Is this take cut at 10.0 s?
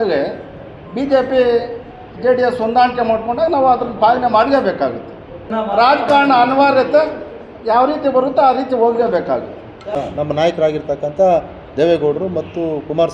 yes; 2 cuts; at 5.5 s, 10.0 s

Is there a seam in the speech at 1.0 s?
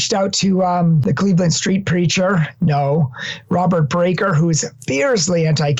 yes; 1 cut; at 1.0 s

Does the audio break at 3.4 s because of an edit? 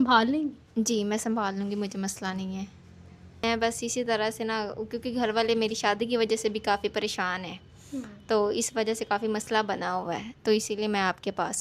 yes; 1 cut; at 3.4 s

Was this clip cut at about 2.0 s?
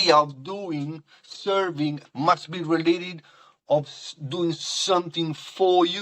yes; 1 cut; at 2.0 s

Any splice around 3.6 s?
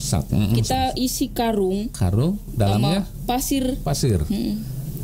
no; 0 cuts

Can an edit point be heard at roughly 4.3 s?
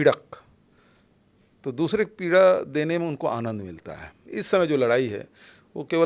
yes; 1 cut; at 4.3 s

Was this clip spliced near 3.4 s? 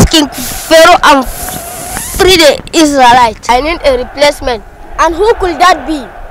yes; 1 cut; at 3.4 s

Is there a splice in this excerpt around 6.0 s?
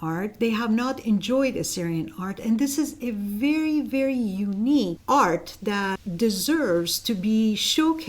yes; 2 cuts; at 5.0 s, 6.0 s

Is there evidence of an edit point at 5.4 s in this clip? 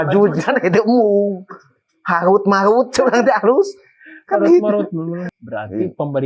yes; 1 cut; at 5.4 s

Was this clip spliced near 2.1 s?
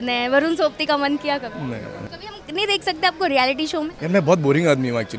yes; 2 cuts; at 2.1 s, 4.0 s

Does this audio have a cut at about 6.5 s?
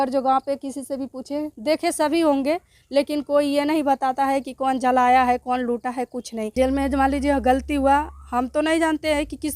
yes; 1 cut; at 6.5 s

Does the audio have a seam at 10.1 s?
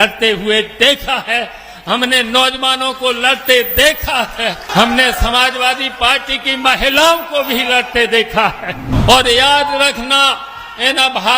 no; 2 cuts; at 4.7 s, 8.9 s

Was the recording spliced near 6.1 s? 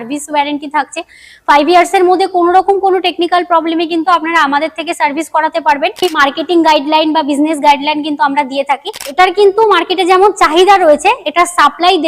yes; 2 cuts; at 6.1 s, 9.0 s

